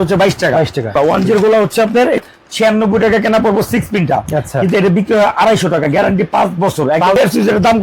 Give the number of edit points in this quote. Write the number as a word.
three